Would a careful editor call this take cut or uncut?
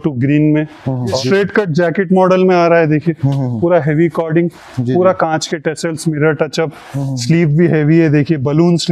cut